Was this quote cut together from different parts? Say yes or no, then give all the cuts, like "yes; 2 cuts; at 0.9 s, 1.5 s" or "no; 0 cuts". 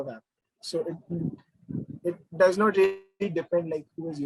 no; 0 cuts